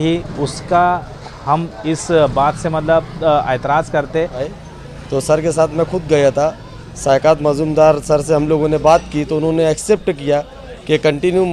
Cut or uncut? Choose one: cut